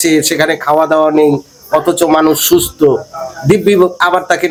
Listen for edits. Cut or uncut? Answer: uncut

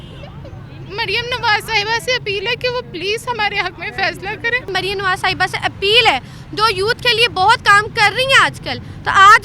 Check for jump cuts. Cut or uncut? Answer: cut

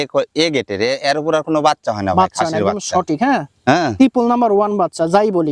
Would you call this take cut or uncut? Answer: uncut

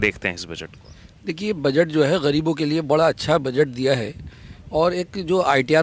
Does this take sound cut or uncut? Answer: uncut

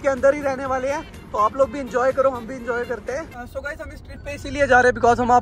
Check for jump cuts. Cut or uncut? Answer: cut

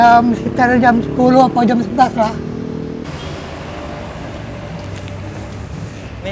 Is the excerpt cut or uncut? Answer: cut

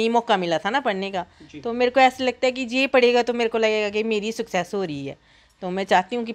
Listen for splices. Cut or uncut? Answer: uncut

